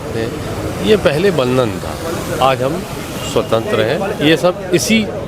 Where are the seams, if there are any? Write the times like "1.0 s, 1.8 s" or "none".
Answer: none